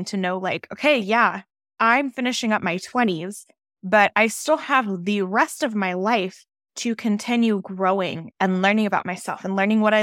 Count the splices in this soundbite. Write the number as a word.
one